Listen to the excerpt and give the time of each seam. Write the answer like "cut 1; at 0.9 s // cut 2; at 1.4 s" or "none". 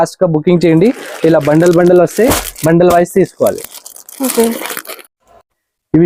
none